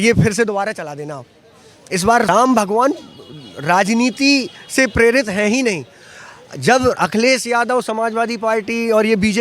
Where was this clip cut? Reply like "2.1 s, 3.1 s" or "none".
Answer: 2.3 s